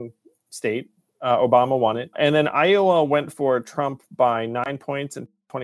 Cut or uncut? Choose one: cut